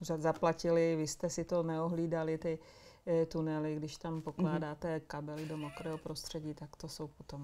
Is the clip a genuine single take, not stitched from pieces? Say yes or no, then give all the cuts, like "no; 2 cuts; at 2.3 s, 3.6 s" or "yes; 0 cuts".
yes; 0 cuts